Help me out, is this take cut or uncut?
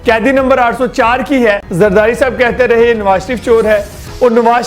cut